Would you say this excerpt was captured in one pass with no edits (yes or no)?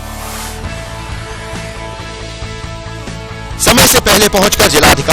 yes